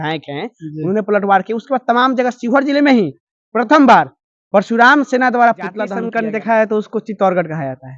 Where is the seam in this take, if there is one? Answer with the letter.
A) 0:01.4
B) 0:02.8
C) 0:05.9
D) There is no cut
C